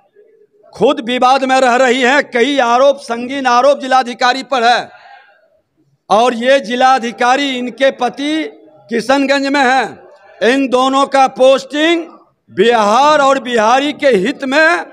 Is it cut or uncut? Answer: uncut